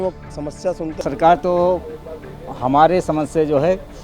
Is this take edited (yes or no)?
yes